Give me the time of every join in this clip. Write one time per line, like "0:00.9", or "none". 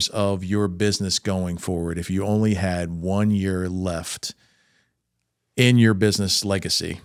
none